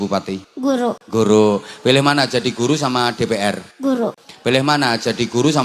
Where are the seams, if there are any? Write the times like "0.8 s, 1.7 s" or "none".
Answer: 0.8 s, 4.0 s